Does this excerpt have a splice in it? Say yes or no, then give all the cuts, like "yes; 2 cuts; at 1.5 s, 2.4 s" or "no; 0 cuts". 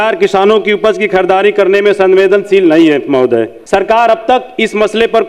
yes; 1 cut; at 3.6 s